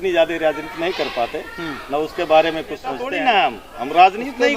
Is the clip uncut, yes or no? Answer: no